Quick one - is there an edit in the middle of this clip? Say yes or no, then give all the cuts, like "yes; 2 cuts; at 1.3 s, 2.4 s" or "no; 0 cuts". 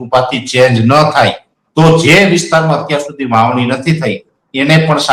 no; 0 cuts